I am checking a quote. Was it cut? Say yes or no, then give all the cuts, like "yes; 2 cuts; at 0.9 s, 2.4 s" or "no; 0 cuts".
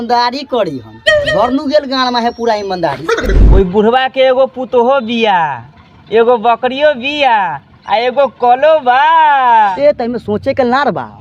yes; 2 cuts; at 3.3 s, 9.7 s